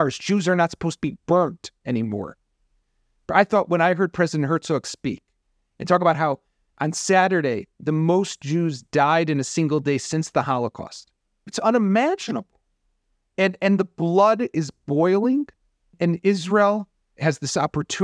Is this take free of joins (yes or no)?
no